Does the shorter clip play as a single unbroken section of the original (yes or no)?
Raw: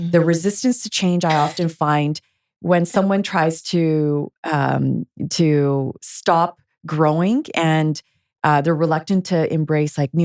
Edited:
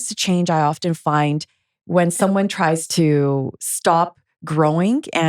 no